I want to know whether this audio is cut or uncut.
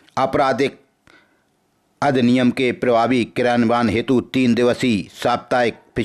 uncut